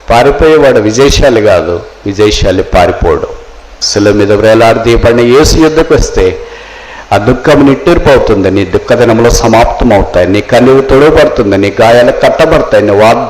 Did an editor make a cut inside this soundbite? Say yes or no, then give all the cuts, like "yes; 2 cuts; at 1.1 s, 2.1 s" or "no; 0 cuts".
yes; 1 cut; at 3.8 s